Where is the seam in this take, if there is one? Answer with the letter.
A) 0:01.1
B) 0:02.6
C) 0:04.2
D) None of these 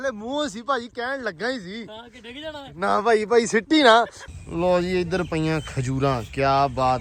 C